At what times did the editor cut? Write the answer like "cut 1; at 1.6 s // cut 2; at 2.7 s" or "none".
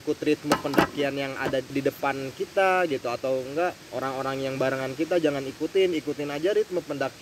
cut 1; at 1.7 s // cut 2; at 3.9 s